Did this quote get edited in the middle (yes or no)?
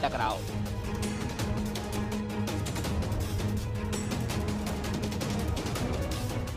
yes